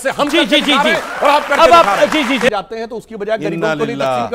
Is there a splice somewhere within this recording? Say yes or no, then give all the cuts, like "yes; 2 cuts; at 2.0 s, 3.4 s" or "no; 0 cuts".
yes; 1 cut; at 2.5 s